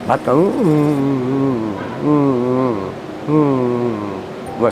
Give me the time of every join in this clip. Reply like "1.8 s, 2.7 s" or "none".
none